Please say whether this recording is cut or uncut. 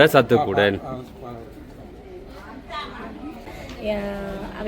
cut